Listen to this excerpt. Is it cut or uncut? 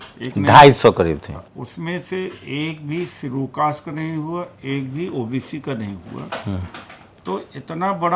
cut